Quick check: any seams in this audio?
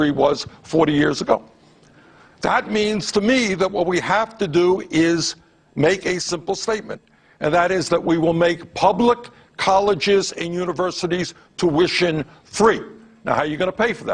yes; 1 cut; at 0.9 s

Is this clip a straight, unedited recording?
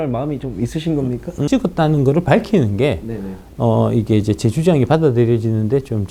no; 1 cut; at 1.4 s

